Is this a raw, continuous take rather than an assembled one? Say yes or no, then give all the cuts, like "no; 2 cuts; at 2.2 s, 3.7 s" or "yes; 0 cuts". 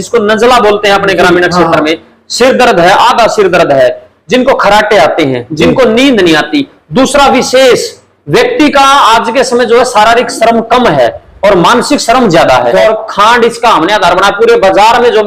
no; 1 cut; at 12.8 s